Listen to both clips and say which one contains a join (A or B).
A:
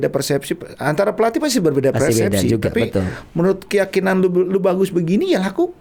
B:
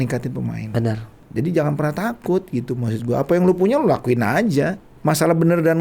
B